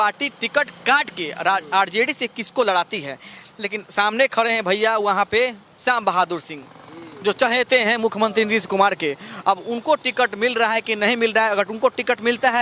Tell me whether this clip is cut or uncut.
uncut